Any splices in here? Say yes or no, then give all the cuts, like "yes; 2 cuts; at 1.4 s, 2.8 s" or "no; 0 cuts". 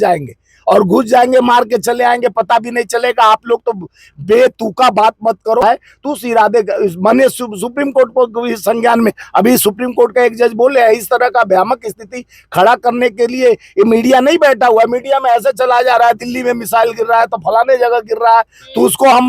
yes; 1 cut; at 5.6 s